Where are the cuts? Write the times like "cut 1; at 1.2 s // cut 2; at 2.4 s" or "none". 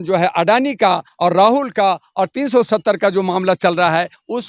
none